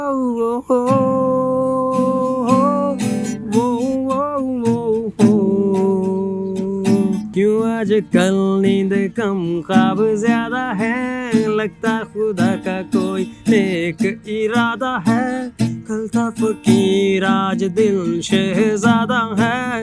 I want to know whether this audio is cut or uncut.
cut